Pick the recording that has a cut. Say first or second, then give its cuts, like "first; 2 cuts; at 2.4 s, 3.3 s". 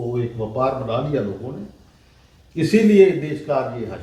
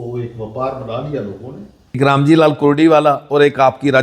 second; 1 cut; at 2.0 s